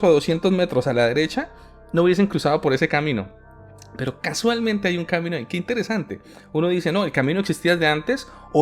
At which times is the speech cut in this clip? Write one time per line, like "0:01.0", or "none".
none